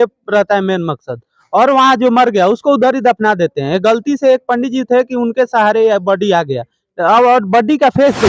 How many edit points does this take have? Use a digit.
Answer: 0